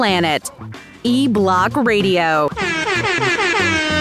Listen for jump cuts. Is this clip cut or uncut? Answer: cut